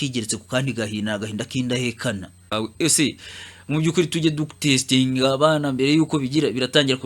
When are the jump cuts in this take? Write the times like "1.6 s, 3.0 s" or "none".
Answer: 2.5 s